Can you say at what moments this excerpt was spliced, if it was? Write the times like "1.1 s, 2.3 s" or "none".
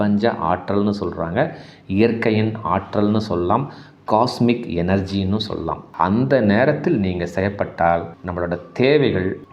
5.8 s